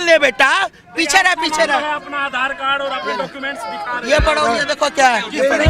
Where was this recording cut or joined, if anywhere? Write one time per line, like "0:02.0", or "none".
none